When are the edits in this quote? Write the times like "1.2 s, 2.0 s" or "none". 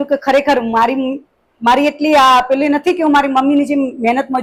none